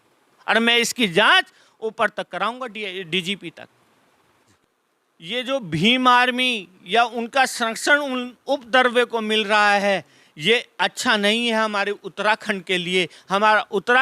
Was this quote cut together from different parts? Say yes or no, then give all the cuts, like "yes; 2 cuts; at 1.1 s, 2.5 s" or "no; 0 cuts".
yes; 1 cut; at 4.5 s